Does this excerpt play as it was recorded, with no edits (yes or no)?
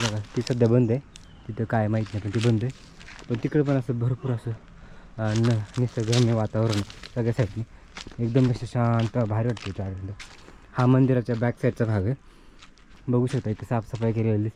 yes